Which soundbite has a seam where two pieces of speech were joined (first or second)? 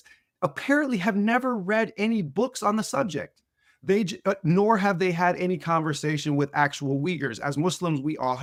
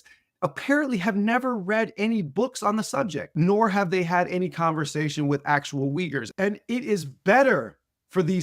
second